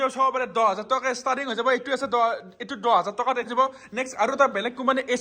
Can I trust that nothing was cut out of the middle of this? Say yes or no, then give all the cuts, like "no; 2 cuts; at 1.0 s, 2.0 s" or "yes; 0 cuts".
no; 1 cut; at 3.5 s